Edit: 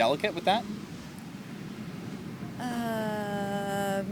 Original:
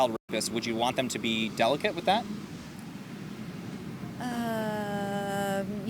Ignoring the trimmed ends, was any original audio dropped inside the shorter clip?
no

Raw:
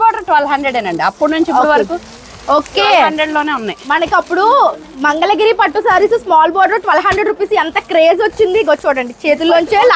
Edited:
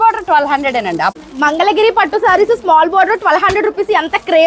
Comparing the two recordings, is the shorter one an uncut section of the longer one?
no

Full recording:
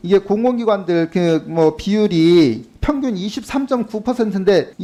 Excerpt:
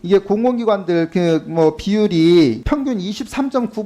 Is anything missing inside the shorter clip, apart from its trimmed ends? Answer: yes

